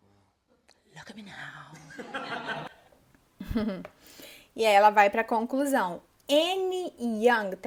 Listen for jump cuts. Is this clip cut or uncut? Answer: uncut